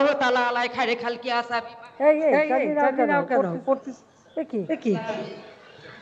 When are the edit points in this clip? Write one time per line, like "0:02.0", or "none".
none